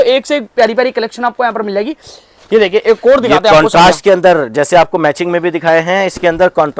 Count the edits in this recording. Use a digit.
0